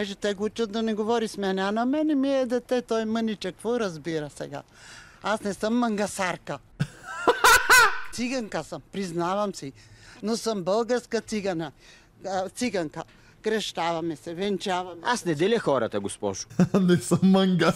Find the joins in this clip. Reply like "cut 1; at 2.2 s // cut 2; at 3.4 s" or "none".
cut 1; at 16.5 s